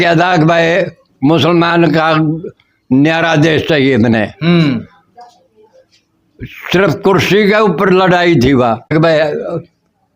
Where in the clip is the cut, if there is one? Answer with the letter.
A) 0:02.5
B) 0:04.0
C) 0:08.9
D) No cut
C